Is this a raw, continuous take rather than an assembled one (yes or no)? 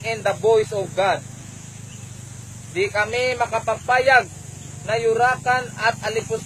yes